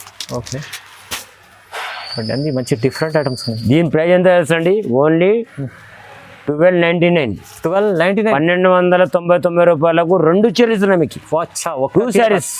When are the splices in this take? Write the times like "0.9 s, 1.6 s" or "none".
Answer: none